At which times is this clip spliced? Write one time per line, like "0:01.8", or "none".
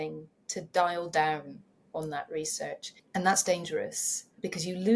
0:02.9